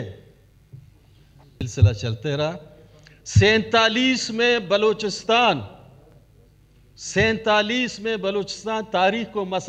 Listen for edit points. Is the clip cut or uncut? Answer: cut